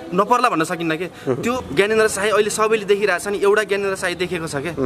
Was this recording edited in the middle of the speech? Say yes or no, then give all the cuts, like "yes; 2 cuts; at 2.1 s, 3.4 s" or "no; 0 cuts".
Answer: yes; 1 cut; at 1.5 s